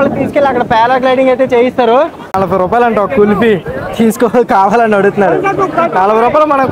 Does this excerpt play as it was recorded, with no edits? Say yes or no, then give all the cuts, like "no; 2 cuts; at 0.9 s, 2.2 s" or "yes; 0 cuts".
no; 1 cut; at 2.2 s